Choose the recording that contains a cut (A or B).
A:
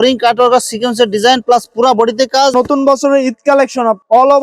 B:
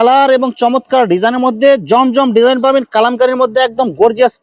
A